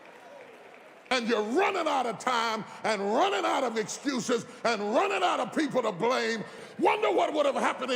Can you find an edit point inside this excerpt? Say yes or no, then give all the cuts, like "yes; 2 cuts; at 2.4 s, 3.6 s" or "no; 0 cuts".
yes; 2 cuts; at 1.1 s, 6.6 s